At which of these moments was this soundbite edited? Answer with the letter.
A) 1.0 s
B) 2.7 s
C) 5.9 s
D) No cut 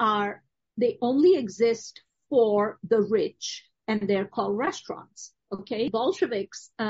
C